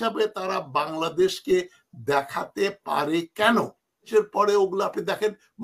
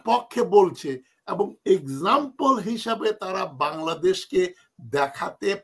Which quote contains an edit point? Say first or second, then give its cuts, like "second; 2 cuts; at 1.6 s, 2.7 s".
first; 1 cut; at 4.1 s